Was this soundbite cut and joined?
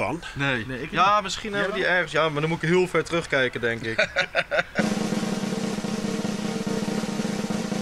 yes; 1 cut; at 4.7 s

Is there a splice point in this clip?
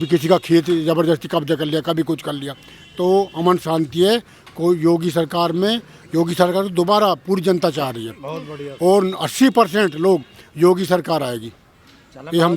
no; 0 cuts

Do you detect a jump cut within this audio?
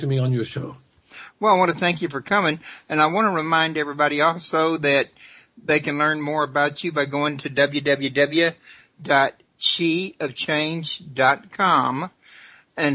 yes; 1 cut; at 8.3 s

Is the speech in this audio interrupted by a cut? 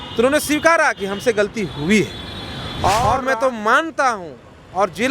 yes; 1 cut; at 3.0 s

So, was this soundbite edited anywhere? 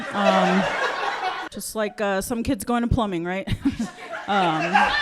yes; 1 cut; at 1.5 s

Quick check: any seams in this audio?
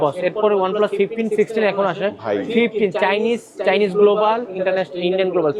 no; 0 cuts

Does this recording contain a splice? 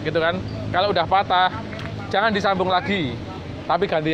no; 0 cuts

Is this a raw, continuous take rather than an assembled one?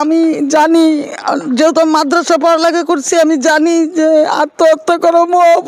yes; 0 cuts

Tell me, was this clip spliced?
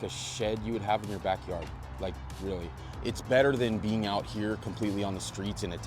yes; 1 cut; at 2.8 s

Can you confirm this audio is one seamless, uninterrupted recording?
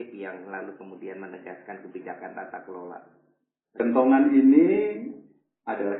no; 1 cut; at 3.7 s

